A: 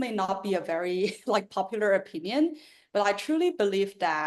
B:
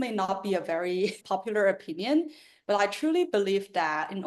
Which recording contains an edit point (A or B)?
B